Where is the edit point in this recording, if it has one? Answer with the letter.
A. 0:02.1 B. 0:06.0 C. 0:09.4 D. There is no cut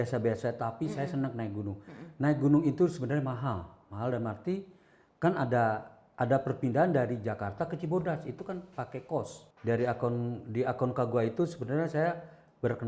C